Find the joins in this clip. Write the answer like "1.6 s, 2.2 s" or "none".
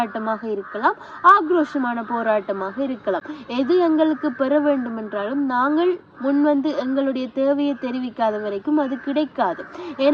none